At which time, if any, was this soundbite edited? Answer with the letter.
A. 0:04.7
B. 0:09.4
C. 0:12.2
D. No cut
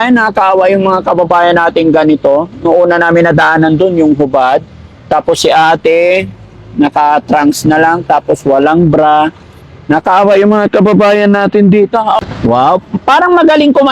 C